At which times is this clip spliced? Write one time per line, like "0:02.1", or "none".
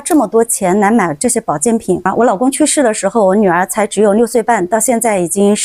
0:02.1